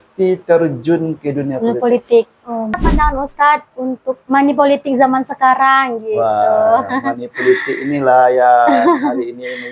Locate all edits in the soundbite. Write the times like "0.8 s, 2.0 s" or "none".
2.8 s